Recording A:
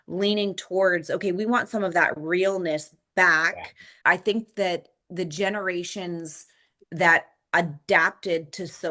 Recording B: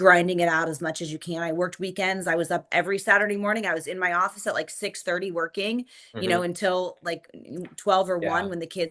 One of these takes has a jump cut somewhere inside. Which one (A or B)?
A